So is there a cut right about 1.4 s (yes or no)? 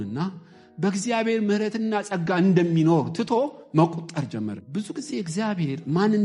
no